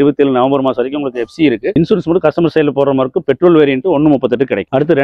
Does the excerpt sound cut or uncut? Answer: uncut